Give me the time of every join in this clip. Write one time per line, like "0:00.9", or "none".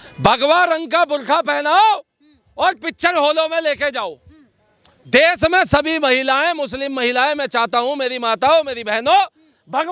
none